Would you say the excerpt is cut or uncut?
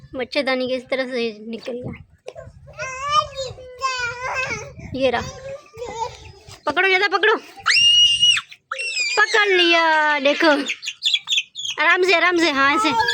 uncut